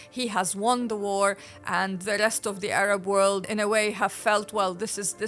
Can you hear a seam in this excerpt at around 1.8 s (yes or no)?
no